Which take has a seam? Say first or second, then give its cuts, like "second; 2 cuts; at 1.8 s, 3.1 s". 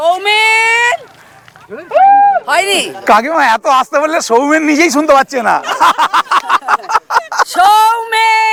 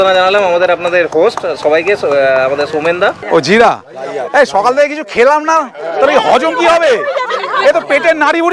second; 1 cut; at 3.2 s